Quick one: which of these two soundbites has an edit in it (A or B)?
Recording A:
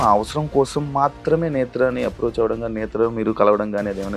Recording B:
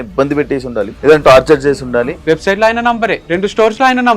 B